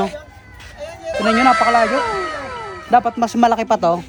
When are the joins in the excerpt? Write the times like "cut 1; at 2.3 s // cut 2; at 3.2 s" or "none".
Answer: none